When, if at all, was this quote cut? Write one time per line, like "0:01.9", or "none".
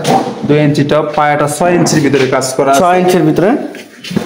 none

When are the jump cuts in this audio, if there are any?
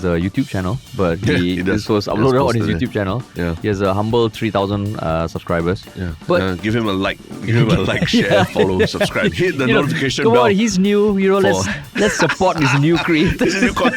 none

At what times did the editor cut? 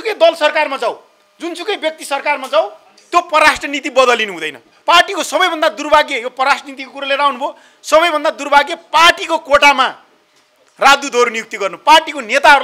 0:04.7

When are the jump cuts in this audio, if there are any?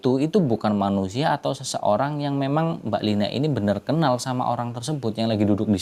none

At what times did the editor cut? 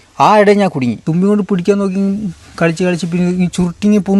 0:01.0

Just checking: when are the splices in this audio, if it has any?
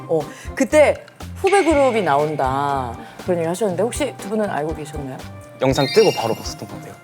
0:01.2
0:02.9
0:05.4

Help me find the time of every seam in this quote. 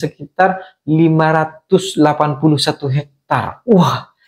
none

